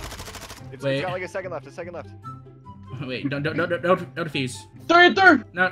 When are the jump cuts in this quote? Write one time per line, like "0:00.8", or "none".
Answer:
none